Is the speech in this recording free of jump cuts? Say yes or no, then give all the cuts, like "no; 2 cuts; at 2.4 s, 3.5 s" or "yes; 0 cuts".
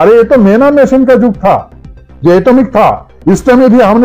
yes; 0 cuts